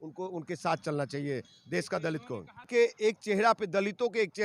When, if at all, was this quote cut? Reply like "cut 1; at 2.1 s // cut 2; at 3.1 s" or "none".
cut 1; at 2.7 s